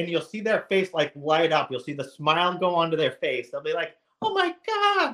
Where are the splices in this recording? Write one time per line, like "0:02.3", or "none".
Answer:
none